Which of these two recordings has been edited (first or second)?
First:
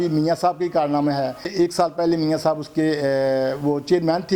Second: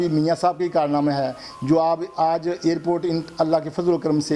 first